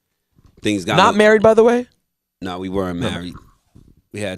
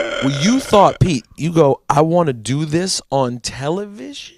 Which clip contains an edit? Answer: first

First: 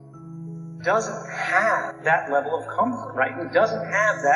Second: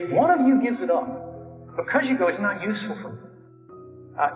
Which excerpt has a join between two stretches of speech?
first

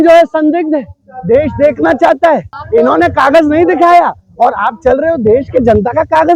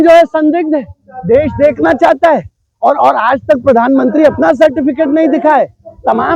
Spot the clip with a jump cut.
first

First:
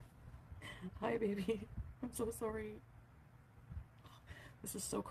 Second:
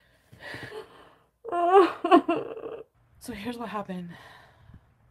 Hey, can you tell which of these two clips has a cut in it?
second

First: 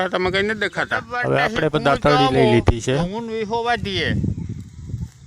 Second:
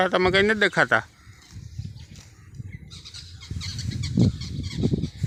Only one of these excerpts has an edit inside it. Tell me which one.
first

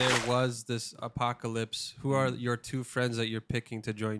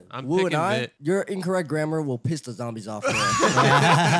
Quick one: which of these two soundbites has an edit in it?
second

